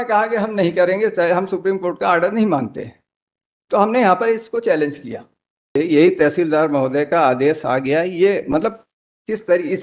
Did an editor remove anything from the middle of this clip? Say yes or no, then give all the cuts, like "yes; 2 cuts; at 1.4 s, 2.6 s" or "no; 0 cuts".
yes; 1 cut; at 5.8 s